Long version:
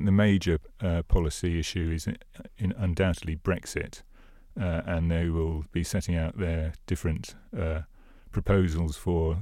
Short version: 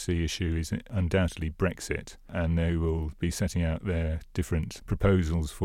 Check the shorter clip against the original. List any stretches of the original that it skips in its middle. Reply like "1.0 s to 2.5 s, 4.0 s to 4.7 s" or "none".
2.3 s to 2.8 s, 4.2 s to 4.8 s, 7.3 s to 8.2 s

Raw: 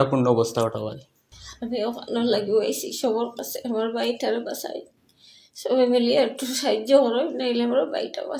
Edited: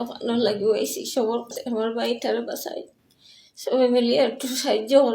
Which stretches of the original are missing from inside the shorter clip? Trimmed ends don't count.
3.4 s to 3.5 s

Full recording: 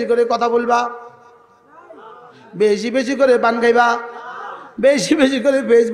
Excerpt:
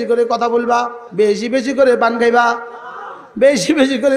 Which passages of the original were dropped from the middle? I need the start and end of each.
1.0 s to 2.4 s

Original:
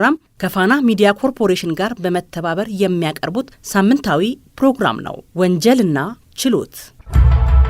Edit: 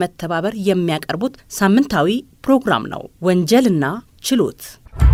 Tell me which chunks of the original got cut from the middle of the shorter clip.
none

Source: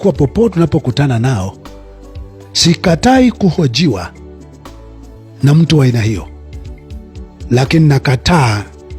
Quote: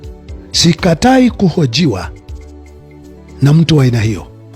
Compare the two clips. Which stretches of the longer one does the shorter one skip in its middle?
none

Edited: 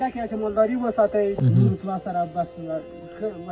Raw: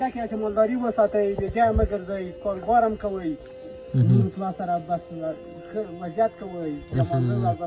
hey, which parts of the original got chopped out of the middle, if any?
1.4 s to 3.9 s

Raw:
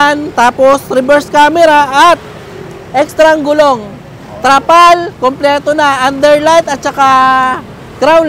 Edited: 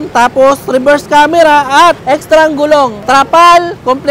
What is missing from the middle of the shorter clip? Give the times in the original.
2.2 s to 2.9 s, 3.8 s to 4.3 s

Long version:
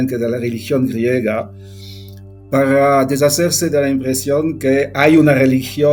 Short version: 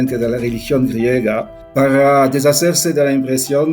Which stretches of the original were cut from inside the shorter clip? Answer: 1.6 s to 2.3 s

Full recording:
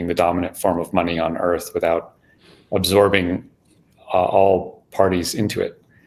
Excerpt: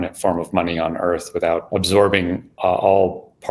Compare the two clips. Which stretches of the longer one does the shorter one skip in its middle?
2.1 s to 2.7 s, 3.5 s to 4.0 s

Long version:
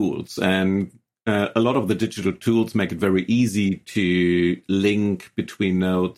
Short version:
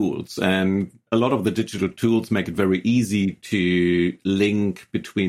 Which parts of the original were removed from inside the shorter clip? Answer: 1.1 s to 1.5 s

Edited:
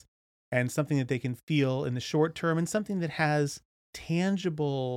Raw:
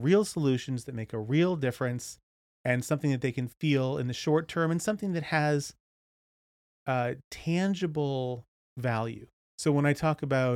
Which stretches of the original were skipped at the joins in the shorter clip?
6.0 s to 7.3 s

